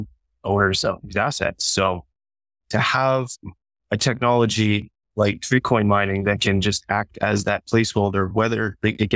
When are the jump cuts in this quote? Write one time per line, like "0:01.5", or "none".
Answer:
none